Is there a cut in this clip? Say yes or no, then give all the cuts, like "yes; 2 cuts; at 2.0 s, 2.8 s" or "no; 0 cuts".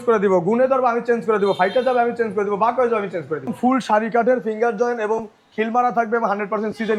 yes; 1 cut; at 3.5 s